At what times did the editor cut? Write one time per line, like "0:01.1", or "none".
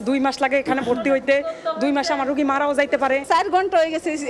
0:03.2